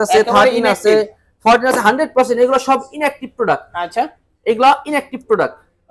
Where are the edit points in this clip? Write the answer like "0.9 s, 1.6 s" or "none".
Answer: none